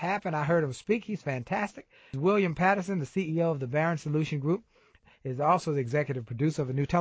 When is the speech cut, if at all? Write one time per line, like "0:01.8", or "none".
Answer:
0:02.1
0:04.9

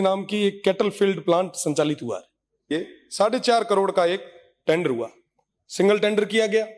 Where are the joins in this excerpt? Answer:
0:02.7

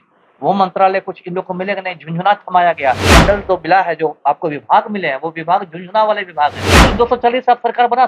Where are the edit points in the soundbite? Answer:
0:03.1
0:06.8

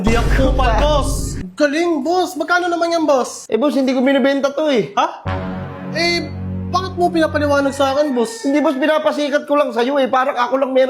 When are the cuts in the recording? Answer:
0:01.4

